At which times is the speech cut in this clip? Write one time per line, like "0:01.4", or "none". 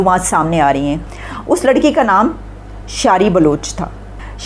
0:01.0